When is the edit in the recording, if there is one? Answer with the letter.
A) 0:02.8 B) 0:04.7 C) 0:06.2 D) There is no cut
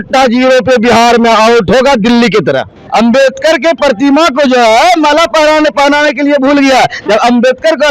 A